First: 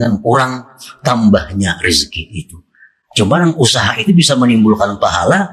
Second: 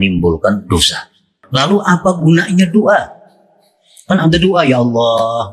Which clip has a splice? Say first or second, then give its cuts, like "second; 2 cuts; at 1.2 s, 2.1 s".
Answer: second; 1 cut; at 1.4 s